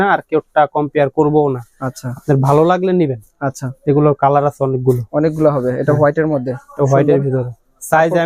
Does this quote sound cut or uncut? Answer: uncut